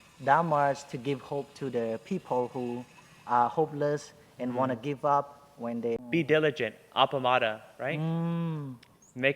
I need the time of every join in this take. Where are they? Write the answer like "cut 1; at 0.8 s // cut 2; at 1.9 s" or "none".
cut 1; at 6.0 s